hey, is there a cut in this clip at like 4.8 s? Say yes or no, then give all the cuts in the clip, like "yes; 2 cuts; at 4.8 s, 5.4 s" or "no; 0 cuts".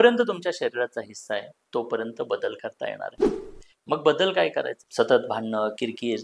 yes; 1 cut; at 4.8 s